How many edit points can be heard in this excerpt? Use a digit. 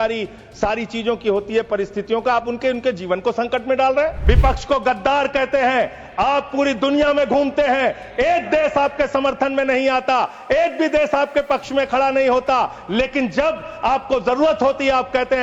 1